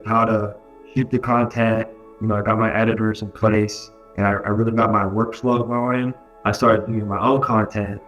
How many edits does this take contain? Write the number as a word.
one